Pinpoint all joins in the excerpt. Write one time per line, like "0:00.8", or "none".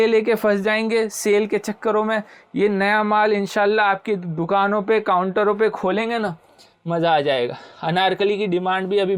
none